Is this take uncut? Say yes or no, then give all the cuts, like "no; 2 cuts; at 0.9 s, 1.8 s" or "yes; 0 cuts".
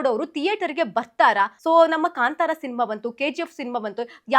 no; 1 cut; at 1.6 s